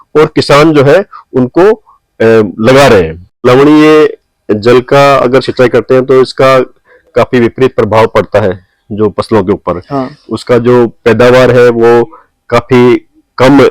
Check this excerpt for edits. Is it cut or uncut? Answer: cut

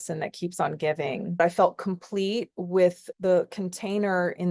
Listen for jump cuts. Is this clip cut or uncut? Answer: cut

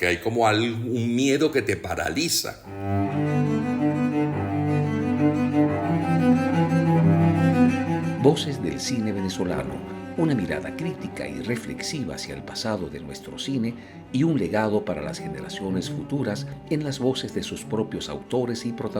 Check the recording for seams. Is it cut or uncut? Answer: cut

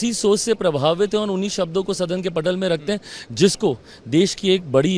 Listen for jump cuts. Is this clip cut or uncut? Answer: uncut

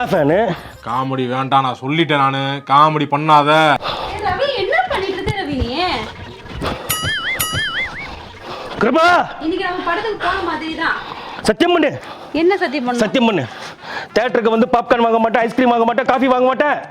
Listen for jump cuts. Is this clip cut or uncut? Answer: cut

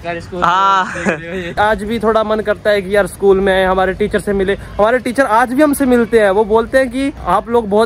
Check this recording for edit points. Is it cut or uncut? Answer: uncut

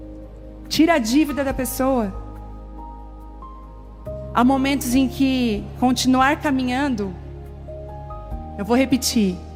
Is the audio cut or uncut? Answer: uncut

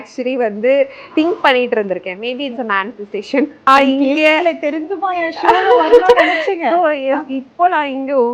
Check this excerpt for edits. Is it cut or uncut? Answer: cut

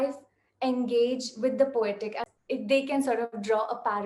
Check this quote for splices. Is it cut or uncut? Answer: cut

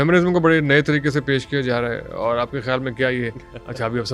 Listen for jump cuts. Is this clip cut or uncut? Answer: uncut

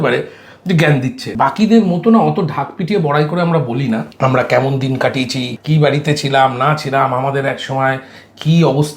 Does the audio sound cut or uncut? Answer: cut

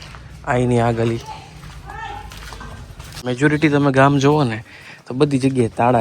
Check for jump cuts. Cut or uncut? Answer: cut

